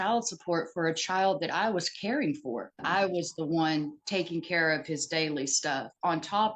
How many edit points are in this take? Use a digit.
1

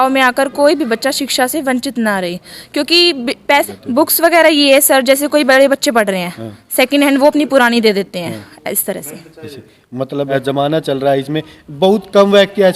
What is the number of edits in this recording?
2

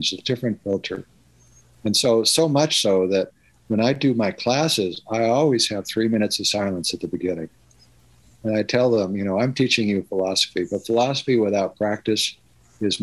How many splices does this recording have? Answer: 0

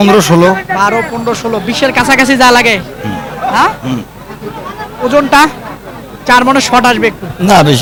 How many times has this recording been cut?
0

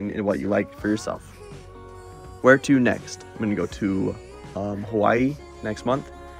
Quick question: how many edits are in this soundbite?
0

